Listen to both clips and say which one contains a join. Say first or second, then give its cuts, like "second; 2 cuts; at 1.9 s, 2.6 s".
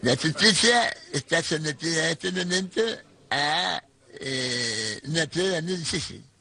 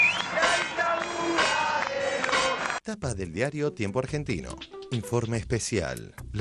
second; 1 cut; at 2.8 s